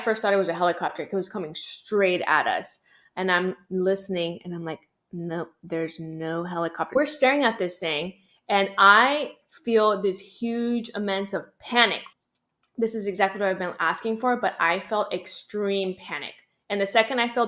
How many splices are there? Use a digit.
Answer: 2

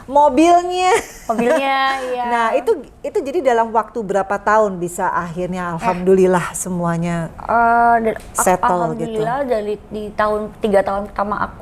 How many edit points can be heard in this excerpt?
0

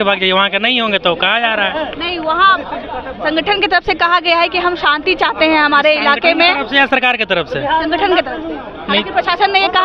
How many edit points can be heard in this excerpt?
0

